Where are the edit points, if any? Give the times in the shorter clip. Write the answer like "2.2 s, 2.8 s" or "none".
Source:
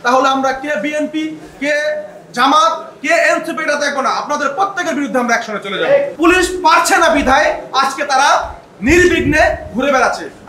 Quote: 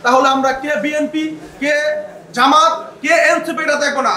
none

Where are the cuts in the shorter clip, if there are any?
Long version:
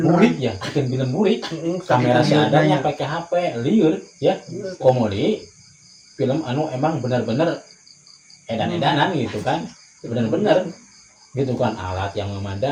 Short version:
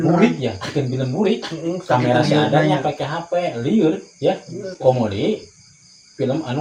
none

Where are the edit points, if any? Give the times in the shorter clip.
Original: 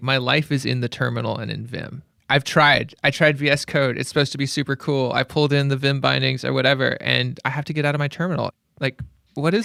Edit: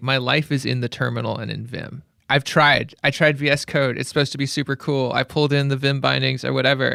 none

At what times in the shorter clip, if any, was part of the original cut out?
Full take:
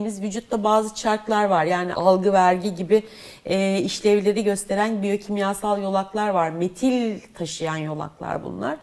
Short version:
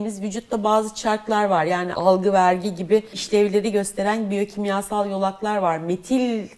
3.2 s

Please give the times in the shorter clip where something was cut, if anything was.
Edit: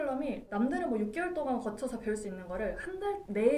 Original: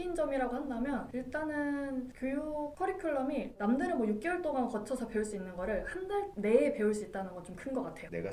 none

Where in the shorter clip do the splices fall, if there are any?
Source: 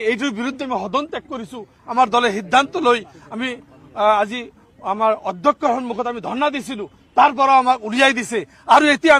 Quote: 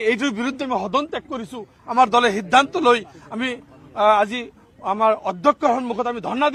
none

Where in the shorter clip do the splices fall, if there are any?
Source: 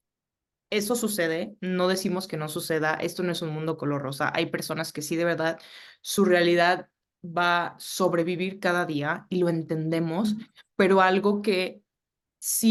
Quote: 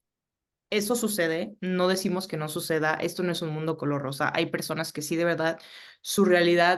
none

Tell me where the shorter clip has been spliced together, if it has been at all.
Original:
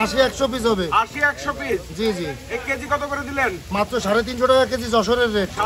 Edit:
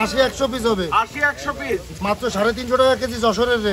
1.9 s

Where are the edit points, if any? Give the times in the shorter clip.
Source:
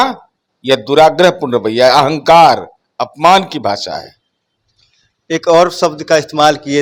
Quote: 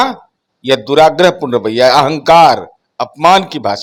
none

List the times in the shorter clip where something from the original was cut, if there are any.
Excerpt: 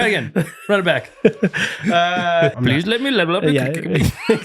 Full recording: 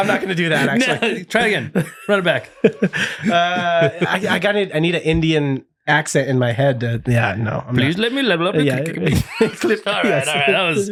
2.5 s

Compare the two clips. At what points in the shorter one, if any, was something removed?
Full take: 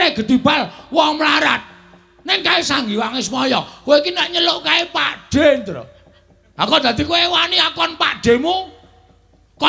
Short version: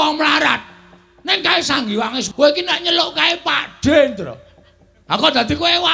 2.2 s

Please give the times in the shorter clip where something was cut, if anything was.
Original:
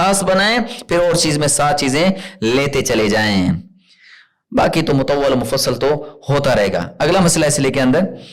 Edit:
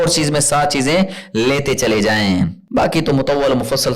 2.6 s

